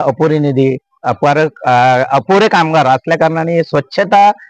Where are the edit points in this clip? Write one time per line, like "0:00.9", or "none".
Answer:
none